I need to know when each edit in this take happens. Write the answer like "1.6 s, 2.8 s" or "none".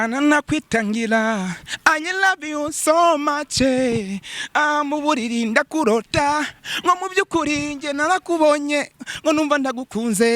none